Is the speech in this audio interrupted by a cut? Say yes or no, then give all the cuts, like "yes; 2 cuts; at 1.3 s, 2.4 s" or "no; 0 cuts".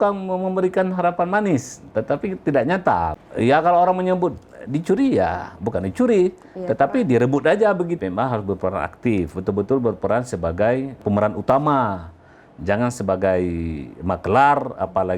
yes; 2 cuts; at 3.2 s, 8.0 s